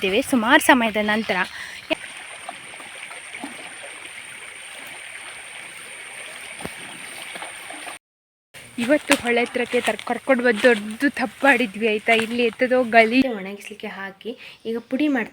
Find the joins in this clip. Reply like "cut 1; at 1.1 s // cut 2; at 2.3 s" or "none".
cut 1; at 1.9 s // cut 2; at 8.0 s // cut 3; at 13.2 s